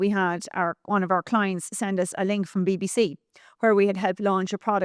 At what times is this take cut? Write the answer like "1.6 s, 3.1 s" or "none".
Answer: none